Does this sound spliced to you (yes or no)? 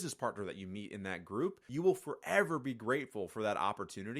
no